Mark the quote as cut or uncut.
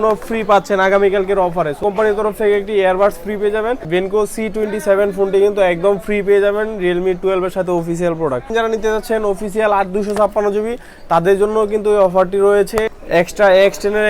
cut